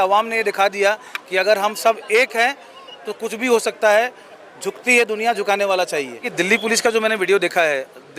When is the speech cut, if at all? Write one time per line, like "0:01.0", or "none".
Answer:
0:06.3